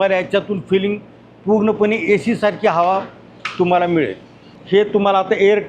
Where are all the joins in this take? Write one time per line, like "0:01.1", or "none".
none